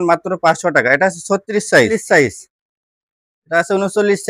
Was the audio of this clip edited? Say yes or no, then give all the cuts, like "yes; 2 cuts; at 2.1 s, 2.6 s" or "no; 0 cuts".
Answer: yes; 1 cut; at 1.9 s